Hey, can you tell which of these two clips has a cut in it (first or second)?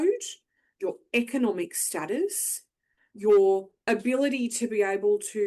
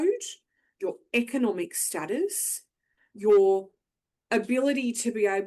first